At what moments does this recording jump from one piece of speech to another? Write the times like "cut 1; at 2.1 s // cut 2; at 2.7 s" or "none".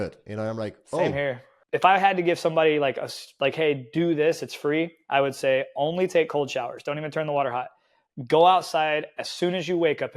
cut 1; at 1.5 s